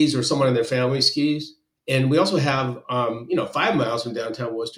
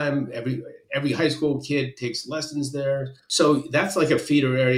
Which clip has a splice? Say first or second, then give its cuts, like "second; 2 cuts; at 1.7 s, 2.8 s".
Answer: second; 1 cut; at 3.2 s